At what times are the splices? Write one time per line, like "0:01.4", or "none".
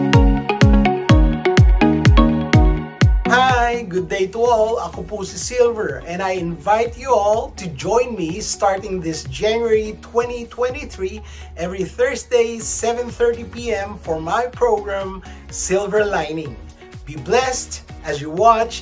none